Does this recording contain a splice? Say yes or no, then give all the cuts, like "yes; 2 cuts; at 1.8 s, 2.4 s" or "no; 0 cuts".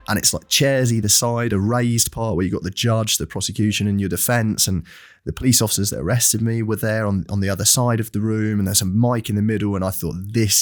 no; 0 cuts